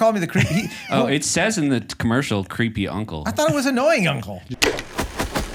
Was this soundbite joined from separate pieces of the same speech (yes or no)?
yes